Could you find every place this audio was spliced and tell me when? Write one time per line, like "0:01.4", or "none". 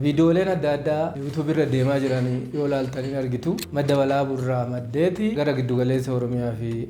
0:01.2
0:03.6